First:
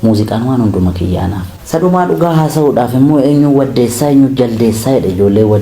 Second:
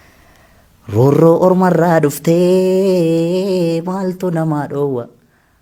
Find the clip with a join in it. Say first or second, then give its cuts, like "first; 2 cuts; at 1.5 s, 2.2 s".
first; 1 cut; at 1.5 s